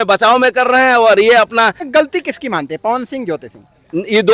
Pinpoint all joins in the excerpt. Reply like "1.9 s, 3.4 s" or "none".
1.8 s